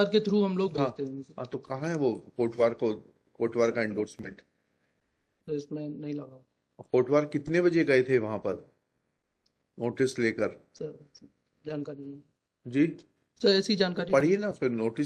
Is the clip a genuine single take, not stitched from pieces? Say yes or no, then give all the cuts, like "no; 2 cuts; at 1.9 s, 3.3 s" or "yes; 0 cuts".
yes; 0 cuts